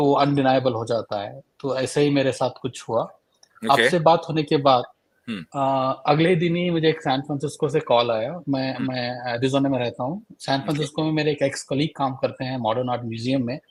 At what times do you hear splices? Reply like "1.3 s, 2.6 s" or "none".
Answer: none